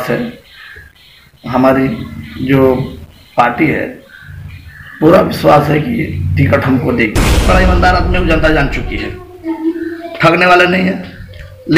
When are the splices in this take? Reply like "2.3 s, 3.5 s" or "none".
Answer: 7.5 s